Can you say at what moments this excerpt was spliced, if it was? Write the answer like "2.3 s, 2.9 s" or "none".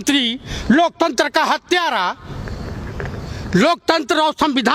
none